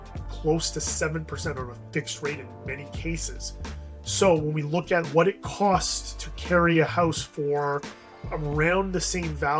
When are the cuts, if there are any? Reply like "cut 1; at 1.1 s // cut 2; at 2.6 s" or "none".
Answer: none